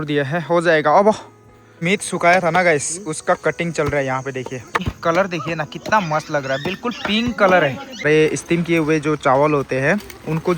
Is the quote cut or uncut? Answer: cut